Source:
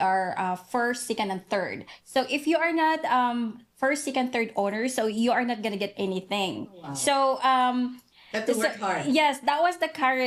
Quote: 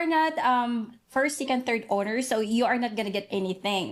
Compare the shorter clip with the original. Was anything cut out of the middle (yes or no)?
no